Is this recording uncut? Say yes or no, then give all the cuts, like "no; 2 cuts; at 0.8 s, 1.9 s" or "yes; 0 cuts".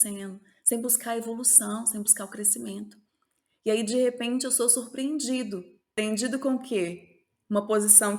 no; 1 cut; at 6.0 s